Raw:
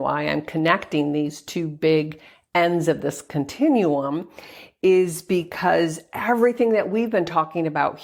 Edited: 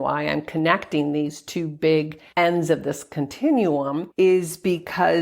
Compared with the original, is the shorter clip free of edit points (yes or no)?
no